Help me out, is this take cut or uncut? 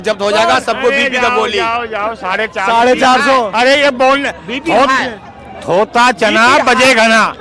uncut